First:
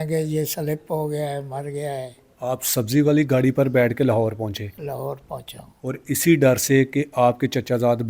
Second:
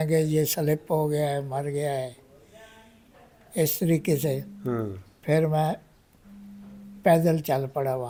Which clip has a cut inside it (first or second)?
first